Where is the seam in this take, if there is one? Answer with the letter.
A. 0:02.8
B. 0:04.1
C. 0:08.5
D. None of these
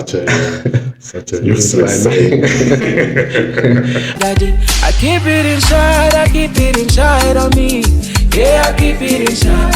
B